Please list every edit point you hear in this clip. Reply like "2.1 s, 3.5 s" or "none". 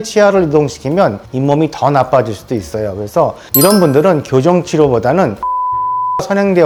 none